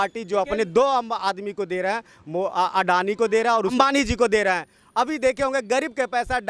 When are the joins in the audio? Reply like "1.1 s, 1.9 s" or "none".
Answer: 3.7 s